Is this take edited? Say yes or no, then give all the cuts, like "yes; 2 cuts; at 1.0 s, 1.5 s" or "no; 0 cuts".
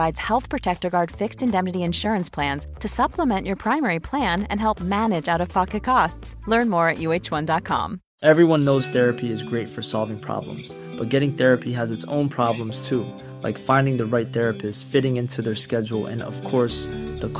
no; 0 cuts